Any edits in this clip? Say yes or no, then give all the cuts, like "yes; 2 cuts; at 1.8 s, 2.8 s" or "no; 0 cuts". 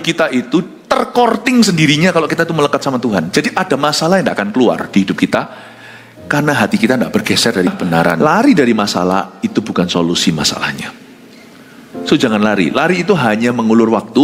yes; 1 cut; at 8.2 s